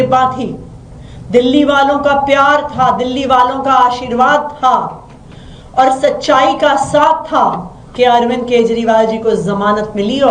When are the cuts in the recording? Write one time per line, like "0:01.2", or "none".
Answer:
none